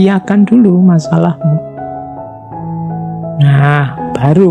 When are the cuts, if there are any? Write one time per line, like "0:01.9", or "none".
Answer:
none